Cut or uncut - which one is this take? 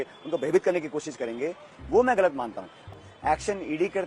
cut